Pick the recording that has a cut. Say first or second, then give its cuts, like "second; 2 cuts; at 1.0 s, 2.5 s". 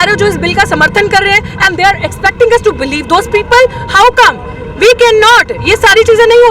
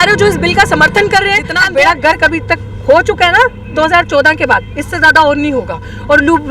second; 1 cut; at 1.5 s